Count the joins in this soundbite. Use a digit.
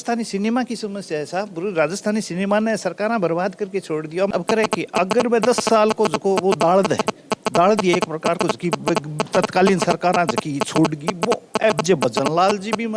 1